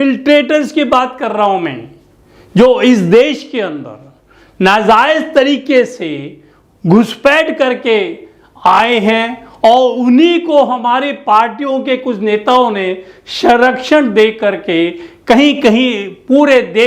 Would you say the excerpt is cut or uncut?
uncut